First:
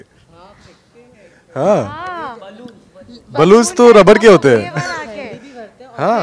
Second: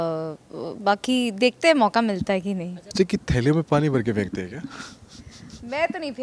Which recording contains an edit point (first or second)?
second